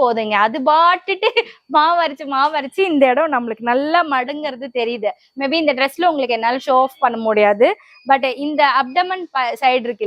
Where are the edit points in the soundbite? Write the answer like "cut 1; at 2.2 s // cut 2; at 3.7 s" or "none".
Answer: none